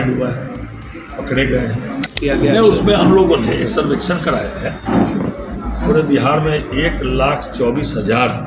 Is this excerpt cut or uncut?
cut